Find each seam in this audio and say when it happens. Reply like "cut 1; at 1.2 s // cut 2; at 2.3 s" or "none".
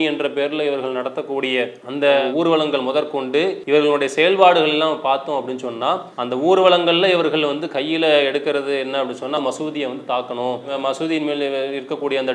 cut 1; at 3.6 s // cut 2; at 9.4 s